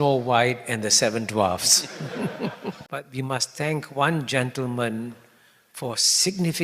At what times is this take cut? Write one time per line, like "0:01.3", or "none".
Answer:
0:02.8